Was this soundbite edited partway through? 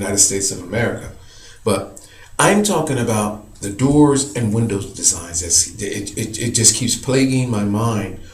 yes; 1 cut; at 6.4 s

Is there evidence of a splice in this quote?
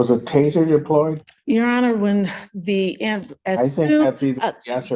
yes; 1 cut; at 1.3 s

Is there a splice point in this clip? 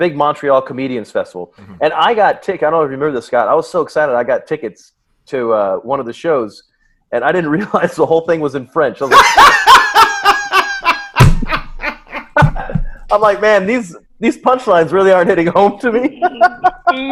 no; 0 cuts

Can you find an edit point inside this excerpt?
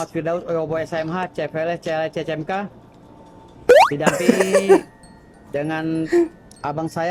no; 0 cuts

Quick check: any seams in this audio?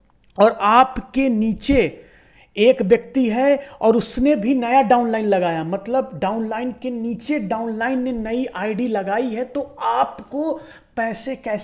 no; 0 cuts

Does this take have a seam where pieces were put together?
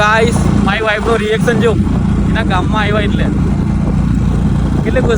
no; 0 cuts

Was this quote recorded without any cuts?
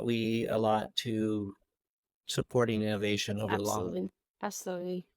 no; 1 cut; at 4.2 s

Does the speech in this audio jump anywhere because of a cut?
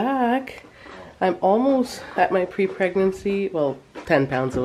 no; 0 cuts

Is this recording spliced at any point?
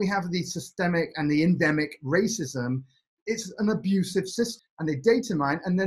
yes; 1 cut; at 4.5 s

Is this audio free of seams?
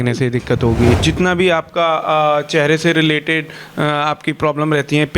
no; 1 cut; at 0.9 s

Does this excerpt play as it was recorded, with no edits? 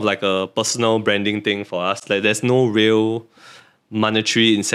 yes; 0 cuts

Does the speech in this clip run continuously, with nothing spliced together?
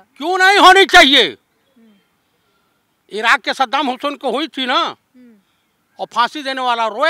yes; 0 cuts

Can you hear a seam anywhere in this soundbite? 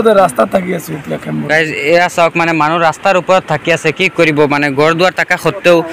no; 0 cuts

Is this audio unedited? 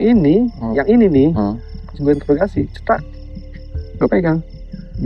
yes; 0 cuts

